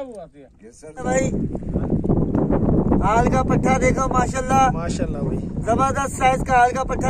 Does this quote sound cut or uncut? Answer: cut